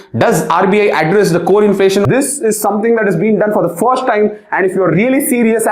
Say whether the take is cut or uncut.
cut